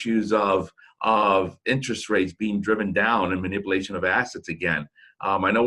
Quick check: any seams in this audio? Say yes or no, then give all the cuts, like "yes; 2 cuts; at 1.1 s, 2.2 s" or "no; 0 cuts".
no; 0 cuts